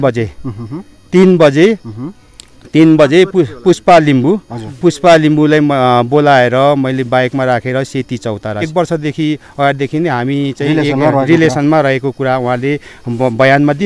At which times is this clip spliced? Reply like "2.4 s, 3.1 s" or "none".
8.7 s